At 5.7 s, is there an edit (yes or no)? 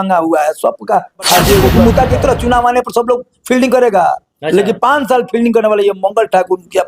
no